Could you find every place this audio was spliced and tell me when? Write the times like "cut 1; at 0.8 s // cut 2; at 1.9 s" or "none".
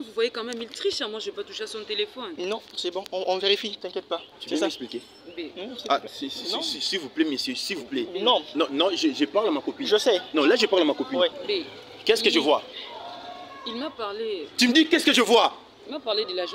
cut 1; at 4.3 s // cut 2; at 11.4 s